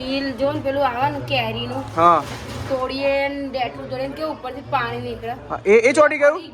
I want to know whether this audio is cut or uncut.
uncut